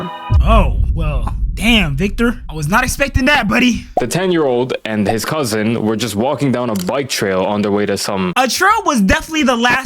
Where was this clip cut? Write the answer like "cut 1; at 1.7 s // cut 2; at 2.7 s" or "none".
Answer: cut 1; at 3.8 s // cut 2; at 8.3 s